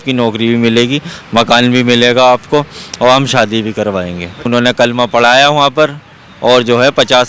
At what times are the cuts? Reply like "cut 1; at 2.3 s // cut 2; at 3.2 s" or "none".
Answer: cut 1; at 4.5 s